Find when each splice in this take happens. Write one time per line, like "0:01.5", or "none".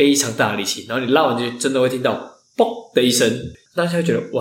0:03.4